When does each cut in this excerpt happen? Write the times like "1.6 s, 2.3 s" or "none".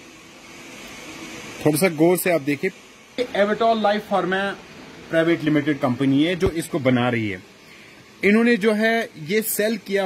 3.2 s